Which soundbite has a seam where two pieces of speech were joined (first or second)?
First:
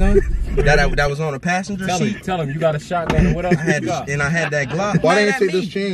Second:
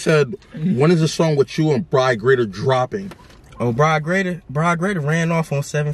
first